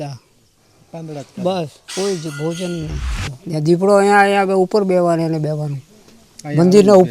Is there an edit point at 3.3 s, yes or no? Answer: yes